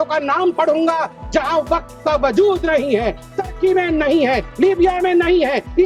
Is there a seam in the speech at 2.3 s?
no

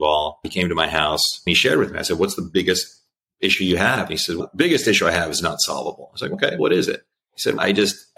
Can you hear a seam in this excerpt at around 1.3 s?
yes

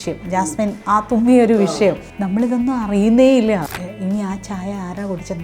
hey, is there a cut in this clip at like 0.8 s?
yes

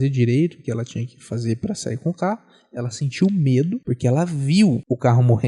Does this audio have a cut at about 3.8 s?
yes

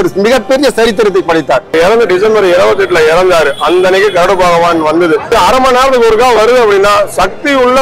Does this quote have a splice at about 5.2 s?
yes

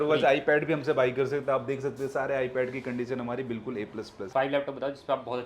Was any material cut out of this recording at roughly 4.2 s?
yes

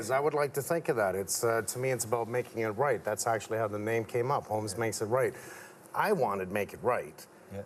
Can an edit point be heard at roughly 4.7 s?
no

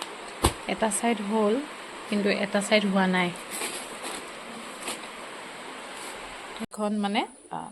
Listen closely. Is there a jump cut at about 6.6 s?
yes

